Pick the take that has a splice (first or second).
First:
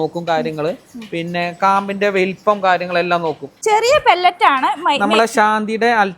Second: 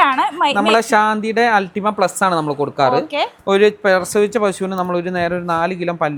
first